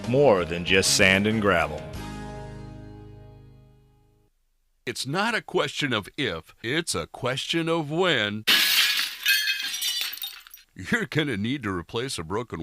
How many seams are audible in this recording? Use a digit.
1